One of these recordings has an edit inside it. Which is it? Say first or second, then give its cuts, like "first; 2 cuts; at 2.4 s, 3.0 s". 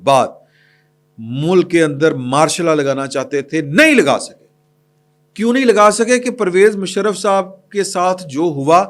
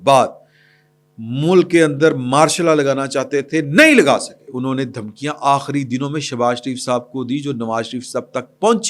second; 1 cut; at 4.5 s